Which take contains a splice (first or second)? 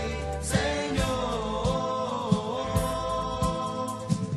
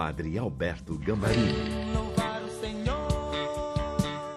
second